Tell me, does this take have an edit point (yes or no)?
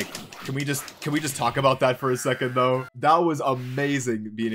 yes